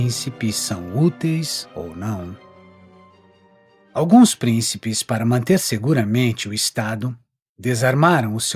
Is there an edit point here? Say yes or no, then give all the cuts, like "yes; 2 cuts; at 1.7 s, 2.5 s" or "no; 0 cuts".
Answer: yes; 1 cut; at 3.6 s